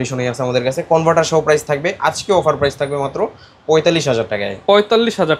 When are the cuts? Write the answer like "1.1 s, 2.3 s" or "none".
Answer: none